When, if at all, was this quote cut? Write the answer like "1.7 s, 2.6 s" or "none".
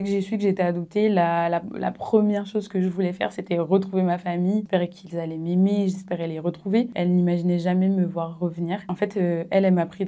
4.6 s, 6.9 s, 8.8 s